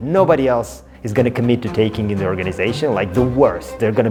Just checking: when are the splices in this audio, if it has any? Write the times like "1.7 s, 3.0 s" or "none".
none